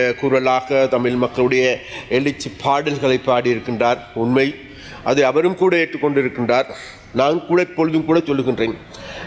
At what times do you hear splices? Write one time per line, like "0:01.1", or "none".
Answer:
none